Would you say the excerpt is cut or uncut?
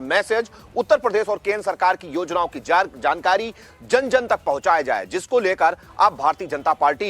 uncut